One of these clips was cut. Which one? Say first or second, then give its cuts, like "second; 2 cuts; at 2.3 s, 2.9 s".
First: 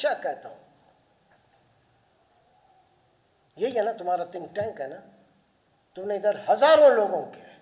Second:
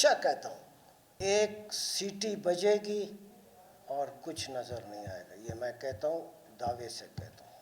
second; 1 cut; at 1.2 s